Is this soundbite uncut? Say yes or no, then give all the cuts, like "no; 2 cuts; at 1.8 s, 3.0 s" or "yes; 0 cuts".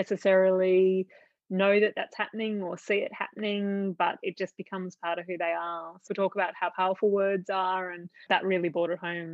no; 2 cuts; at 6.1 s, 8.2 s